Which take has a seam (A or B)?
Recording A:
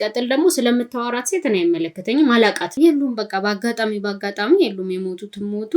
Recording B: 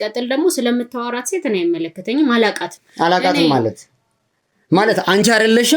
A